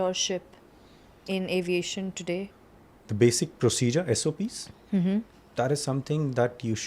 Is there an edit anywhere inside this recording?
yes; 1 cut; at 2.5 s

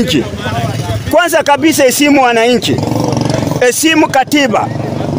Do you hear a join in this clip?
no; 0 cuts

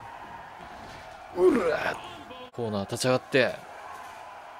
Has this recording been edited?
yes; 1 cut; at 2.5 s

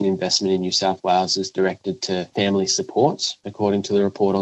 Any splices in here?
yes; 1 cut; at 2.3 s

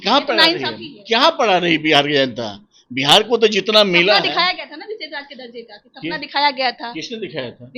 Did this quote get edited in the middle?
no; 0 cuts

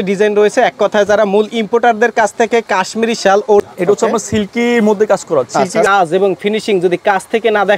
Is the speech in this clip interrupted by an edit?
yes; 2 cuts; at 3.7 s, 5.9 s

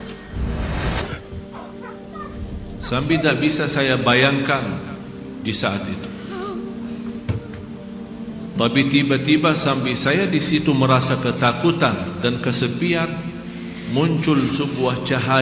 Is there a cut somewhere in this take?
no; 0 cuts

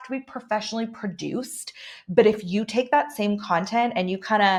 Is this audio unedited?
yes; 0 cuts

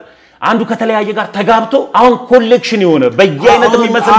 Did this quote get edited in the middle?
yes; 1 cut; at 1.9 s

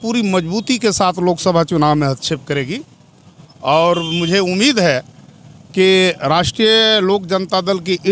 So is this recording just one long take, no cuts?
yes; 0 cuts

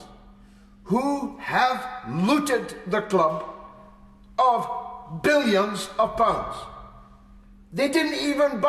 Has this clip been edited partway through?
no; 0 cuts

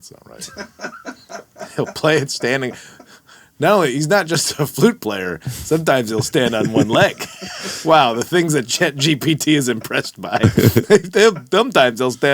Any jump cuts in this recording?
yes; 1 cut; at 7.7 s

